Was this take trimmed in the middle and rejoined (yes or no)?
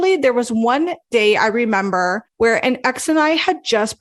yes